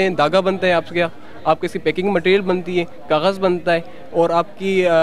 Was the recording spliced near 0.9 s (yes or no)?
no